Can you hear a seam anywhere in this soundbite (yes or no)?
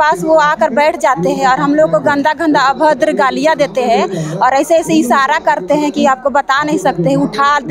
no